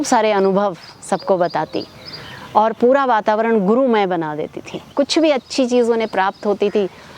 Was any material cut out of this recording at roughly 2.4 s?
no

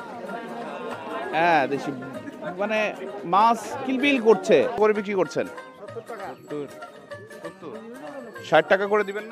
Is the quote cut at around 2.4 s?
no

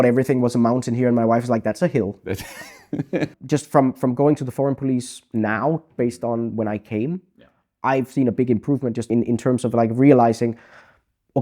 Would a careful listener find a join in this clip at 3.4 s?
yes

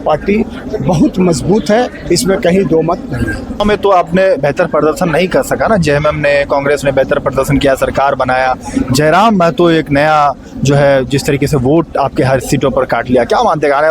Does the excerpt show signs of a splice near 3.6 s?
yes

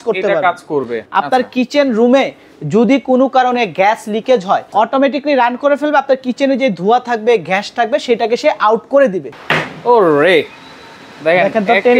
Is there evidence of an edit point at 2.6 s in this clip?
no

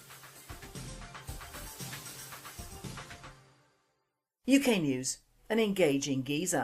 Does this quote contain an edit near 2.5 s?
no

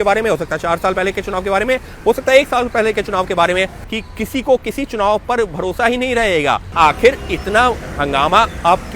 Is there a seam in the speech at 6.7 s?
yes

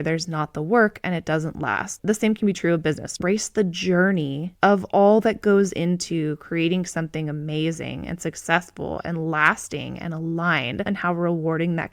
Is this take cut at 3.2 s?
yes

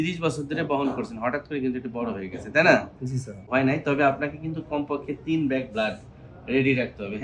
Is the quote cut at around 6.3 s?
no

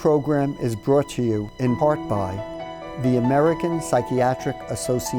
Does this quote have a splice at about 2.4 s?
yes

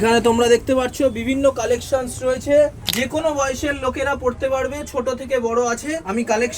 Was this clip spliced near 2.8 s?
yes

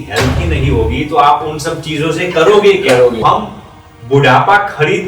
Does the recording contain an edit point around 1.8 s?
no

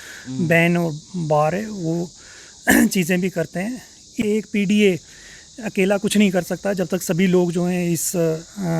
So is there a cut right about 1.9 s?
no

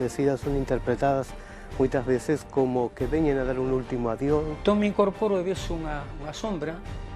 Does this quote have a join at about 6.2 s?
no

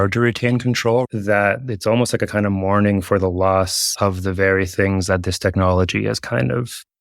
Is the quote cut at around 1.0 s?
yes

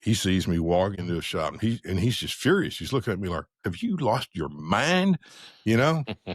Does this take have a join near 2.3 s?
no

